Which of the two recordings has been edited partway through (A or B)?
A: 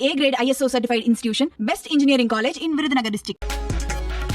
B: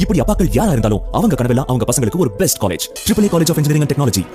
A